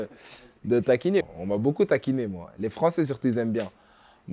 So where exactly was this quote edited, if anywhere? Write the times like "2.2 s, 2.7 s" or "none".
1.2 s